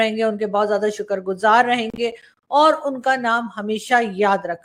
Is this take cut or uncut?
uncut